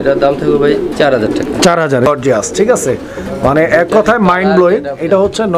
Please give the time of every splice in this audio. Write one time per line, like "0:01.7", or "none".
0:02.1